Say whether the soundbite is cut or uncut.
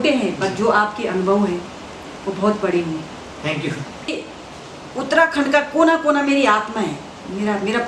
cut